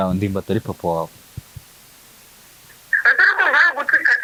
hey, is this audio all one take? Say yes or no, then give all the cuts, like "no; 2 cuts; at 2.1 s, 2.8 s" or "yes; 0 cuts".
yes; 0 cuts